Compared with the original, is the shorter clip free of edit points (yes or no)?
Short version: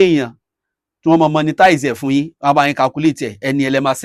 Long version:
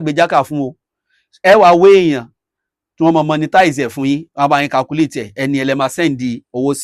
yes